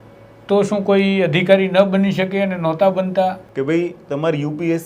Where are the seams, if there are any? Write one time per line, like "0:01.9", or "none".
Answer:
0:03.4